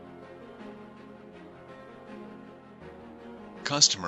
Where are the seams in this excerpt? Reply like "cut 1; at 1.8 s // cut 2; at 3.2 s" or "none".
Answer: none